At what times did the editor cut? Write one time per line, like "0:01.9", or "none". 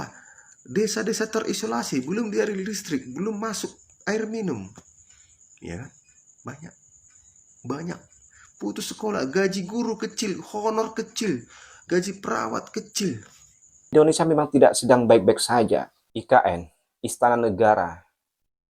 0:13.9